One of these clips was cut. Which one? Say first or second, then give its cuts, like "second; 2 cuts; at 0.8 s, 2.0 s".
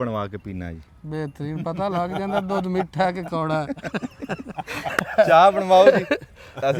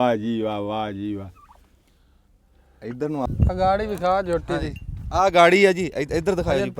second; 1 cut; at 3.2 s